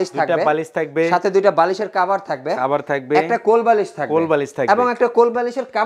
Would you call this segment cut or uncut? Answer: uncut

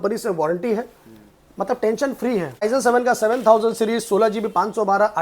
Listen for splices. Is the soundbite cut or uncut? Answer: cut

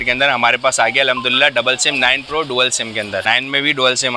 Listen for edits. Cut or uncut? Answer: cut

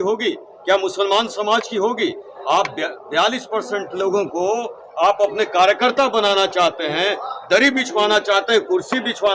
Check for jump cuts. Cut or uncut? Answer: uncut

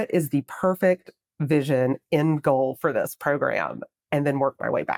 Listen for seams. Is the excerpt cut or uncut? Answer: uncut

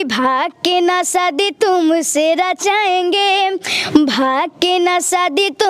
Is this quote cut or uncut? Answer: uncut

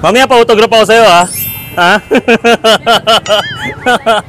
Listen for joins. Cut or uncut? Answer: uncut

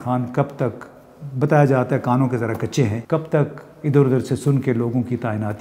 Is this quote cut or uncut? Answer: cut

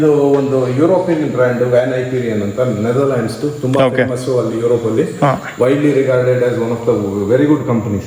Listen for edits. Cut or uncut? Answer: uncut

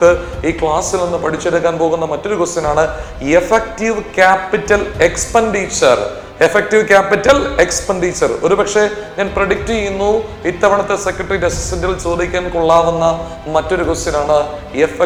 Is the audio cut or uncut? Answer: uncut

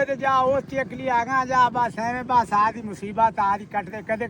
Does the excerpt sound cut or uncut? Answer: uncut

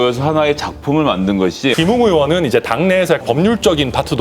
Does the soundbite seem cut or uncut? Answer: cut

